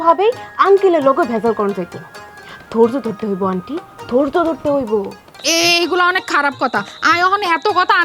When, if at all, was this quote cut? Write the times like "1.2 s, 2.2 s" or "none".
5.4 s